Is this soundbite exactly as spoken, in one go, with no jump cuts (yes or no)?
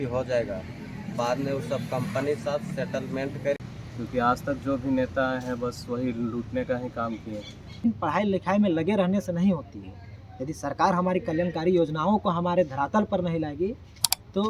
no